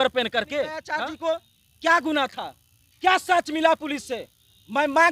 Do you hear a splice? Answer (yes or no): yes